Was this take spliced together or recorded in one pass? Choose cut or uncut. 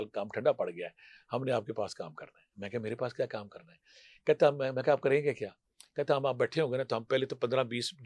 uncut